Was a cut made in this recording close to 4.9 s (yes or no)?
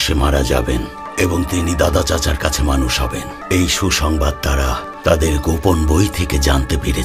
yes